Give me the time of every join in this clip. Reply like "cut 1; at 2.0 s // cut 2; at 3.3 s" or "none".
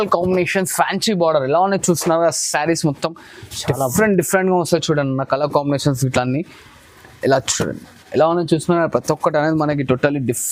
none